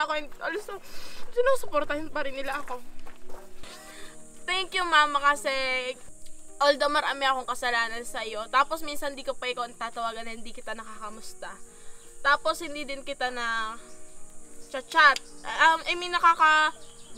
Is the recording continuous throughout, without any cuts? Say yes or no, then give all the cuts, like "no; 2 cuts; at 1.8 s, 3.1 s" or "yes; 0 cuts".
no; 2 cuts; at 3.6 s, 6.1 s